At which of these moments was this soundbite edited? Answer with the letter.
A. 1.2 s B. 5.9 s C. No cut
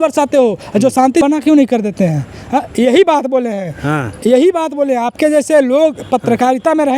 A